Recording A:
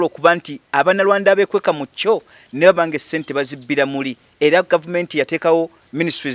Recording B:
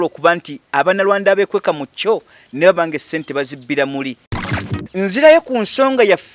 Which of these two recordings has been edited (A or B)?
B